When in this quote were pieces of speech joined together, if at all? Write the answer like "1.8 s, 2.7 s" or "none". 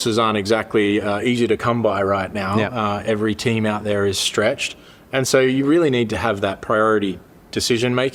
none